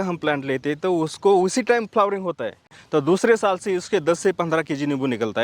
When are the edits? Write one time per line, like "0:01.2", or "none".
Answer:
0:02.8